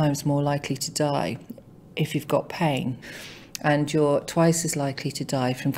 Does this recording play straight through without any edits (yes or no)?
no